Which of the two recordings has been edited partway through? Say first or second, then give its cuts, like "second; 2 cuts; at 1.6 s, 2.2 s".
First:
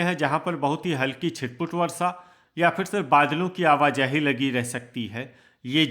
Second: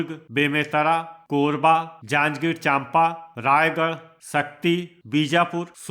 second; 5 cuts; at 1.2 s, 2.0 s, 3.3 s, 4.1 s, 4.9 s